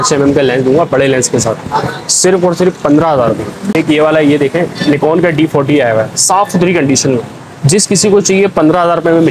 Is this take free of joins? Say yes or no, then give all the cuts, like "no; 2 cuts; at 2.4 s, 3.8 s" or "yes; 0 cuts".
no; 1 cut; at 3.6 s